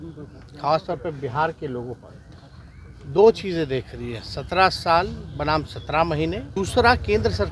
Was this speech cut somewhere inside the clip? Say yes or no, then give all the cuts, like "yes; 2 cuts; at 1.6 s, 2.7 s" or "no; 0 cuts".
yes; 1 cut; at 6.5 s